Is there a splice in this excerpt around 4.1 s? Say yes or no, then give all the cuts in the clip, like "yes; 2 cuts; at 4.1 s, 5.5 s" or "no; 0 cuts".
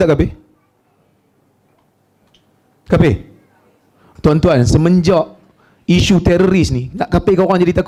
no; 0 cuts